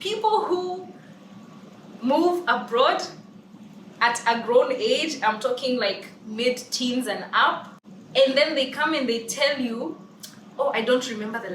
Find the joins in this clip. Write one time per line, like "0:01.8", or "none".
0:07.8